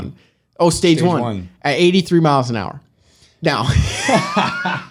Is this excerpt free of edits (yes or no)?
yes